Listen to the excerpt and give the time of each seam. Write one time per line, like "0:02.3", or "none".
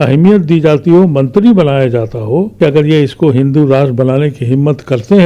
0:02.6